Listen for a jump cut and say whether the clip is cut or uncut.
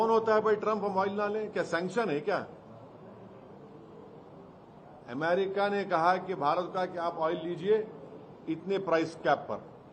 uncut